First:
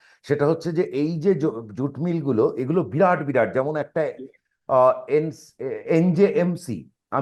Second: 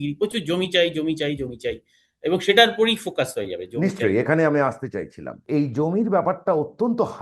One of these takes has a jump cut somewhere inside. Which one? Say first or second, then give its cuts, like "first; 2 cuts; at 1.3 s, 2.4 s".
second; 1 cut; at 5.4 s